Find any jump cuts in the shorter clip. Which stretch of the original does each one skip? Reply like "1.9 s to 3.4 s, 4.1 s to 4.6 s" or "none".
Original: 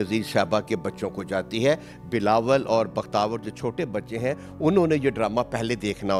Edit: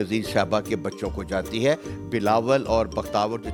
none